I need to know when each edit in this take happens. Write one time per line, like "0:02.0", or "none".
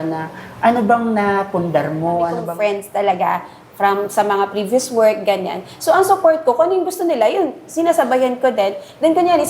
0:02.4